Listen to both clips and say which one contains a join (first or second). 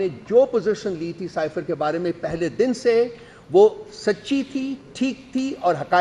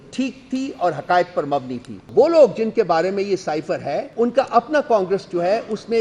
second